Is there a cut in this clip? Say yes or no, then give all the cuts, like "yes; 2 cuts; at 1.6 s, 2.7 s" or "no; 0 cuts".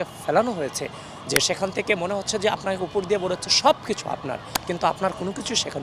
no; 0 cuts